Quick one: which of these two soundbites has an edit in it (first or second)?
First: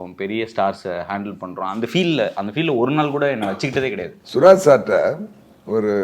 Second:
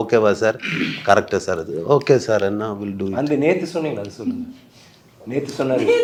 first